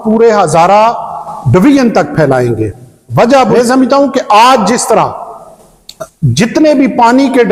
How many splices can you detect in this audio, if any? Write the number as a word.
one